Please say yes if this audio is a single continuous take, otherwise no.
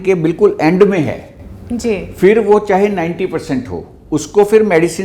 yes